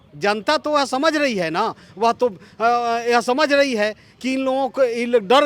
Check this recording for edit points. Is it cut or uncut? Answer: uncut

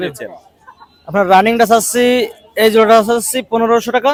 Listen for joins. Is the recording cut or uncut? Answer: uncut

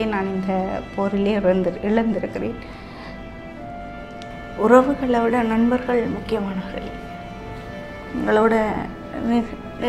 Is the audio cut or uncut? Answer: cut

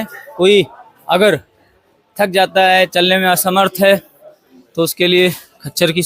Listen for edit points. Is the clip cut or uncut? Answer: uncut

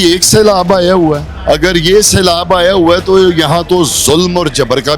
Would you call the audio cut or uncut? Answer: cut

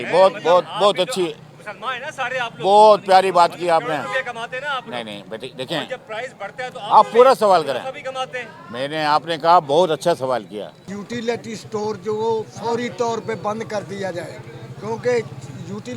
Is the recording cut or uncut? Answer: cut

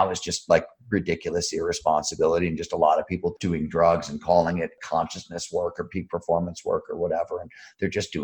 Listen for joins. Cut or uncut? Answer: cut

